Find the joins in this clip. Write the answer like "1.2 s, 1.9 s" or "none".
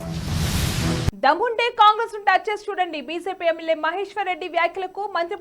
1.1 s